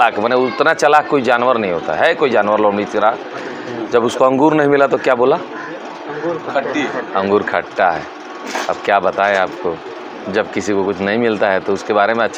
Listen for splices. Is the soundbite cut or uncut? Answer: uncut